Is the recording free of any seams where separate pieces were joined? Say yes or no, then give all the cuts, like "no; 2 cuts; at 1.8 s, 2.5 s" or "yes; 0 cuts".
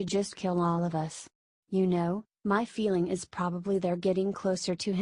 no; 1 cut; at 0.9 s